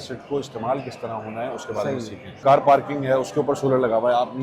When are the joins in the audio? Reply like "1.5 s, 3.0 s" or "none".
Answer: 2.4 s